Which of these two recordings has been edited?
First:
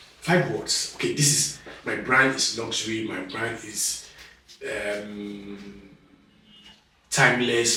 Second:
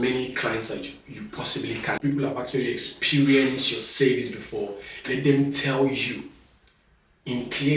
second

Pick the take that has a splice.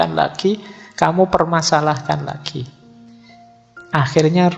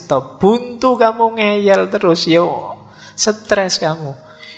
second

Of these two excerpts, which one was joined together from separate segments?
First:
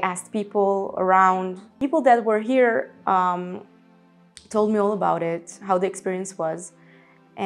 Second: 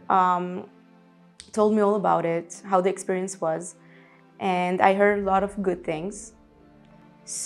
first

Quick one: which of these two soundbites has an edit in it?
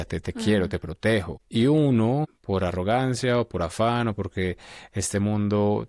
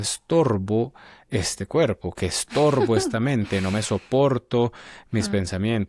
first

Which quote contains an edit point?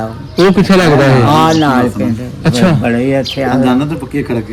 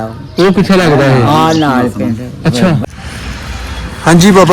second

